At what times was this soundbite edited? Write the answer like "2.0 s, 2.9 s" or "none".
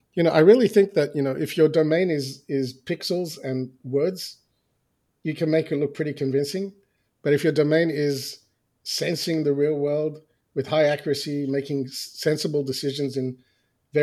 none

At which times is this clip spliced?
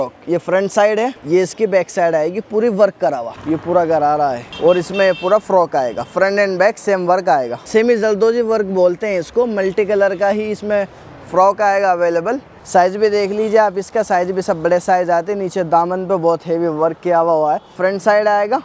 1.2 s, 3.3 s, 4.5 s, 7.6 s, 12.5 s, 17.8 s

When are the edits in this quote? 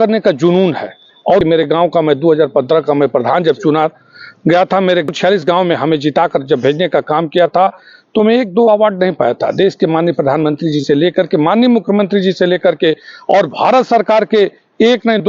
1.4 s, 5.1 s

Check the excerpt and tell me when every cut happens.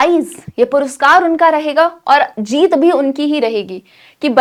none

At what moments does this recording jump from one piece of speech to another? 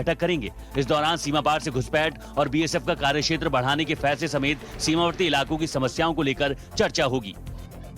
5.3 s

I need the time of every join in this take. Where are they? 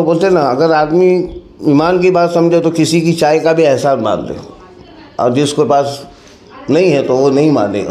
none

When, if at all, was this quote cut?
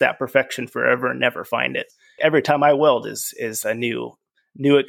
2.2 s

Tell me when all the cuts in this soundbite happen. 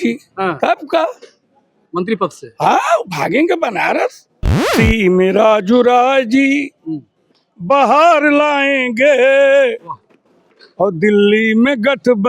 4.7 s

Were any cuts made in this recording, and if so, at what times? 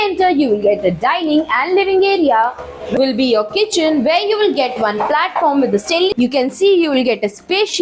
2.8 s, 6.1 s

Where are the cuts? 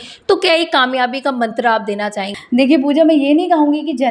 2.3 s

